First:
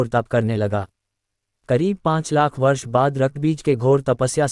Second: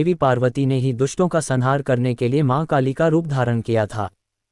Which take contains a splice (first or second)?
first